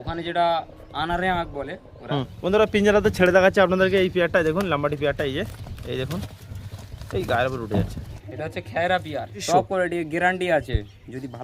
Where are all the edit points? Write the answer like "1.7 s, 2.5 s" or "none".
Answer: 2.3 s, 8.1 s, 9.4 s